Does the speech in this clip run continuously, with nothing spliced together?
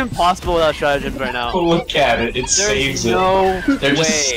yes; 0 cuts

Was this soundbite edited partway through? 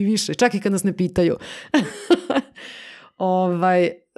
no; 0 cuts

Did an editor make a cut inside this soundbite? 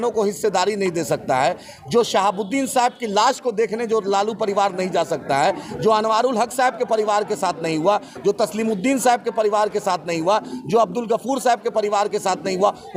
no; 0 cuts

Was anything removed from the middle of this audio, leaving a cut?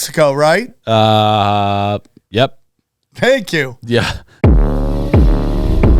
yes; 1 cut; at 4.2 s

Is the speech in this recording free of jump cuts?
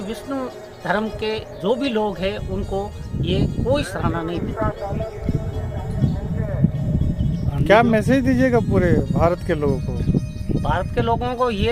yes; 0 cuts

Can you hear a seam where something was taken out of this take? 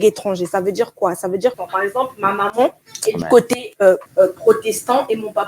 yes; 3 cuts; at 1.6 s, 2.9 s, 4.1 s

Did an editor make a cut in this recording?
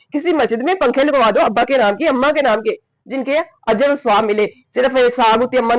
no; 0 cuts

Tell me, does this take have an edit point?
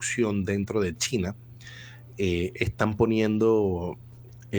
no; 0 cuts

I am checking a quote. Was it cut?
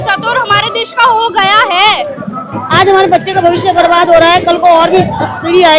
yes; 1 cut; at 2.0 s

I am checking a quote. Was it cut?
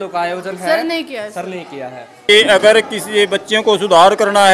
yes; 1 cut; at 2.2 s

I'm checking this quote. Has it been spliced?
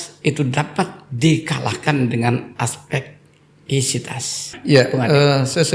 yes; 1 cut; at 4.6 s

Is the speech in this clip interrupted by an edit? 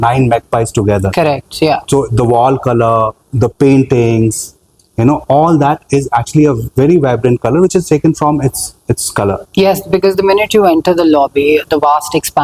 no; 0 cuts

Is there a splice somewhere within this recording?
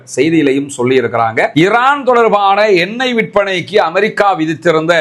yes; 1 cut; at 1.5 s

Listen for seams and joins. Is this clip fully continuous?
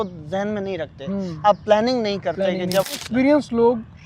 no; 1 cut; at 3.0 s

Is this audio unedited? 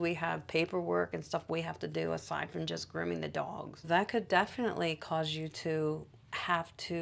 yes; 0 cuts

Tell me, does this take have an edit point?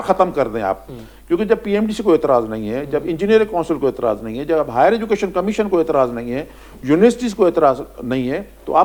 no; 0 cuts

